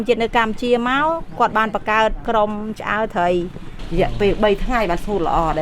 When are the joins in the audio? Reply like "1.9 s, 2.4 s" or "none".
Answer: 2.2 s, 3.8 s